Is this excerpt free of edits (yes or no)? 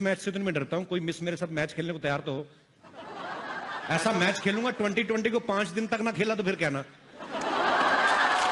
yes